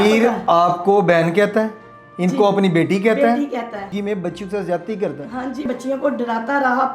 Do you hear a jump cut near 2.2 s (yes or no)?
no